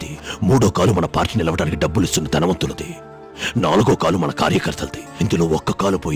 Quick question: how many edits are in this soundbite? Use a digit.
0